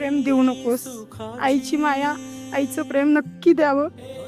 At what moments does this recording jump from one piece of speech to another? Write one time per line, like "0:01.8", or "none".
none